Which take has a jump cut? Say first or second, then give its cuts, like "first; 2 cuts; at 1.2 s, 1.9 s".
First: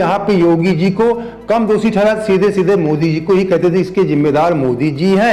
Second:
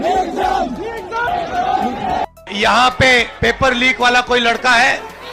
second; 1 cut; at 1.3 s